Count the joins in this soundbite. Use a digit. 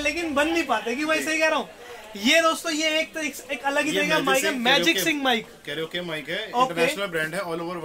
0